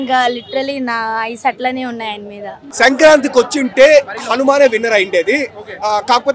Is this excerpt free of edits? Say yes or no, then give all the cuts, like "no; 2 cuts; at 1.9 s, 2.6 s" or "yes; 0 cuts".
no; 1 cut; at 2.6 s